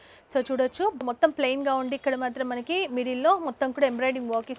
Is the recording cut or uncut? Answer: cut